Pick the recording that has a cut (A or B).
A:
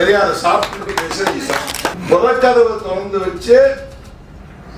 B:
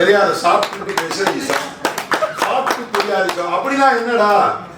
A